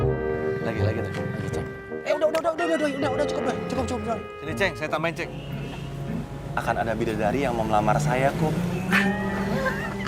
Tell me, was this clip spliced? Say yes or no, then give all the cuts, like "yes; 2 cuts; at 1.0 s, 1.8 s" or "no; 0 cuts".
yes; 1 cut; at 5.4 s